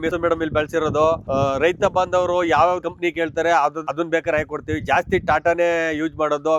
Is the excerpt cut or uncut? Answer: uncut